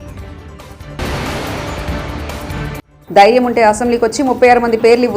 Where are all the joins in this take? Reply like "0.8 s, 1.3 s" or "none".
1.0 s, 2.9 s